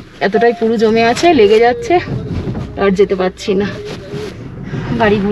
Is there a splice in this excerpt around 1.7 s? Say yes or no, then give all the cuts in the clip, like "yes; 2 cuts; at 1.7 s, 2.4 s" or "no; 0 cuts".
no; 0 cuts